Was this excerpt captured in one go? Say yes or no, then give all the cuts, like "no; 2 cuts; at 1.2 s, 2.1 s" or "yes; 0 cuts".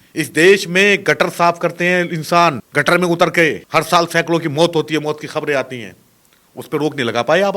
no; 2 cuts; at 2.6 s, 3.6 s